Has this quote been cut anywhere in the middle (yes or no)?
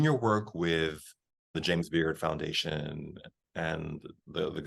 yes